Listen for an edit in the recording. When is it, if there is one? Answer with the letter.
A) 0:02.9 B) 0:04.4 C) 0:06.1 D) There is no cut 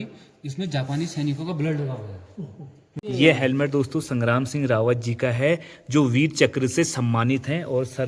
A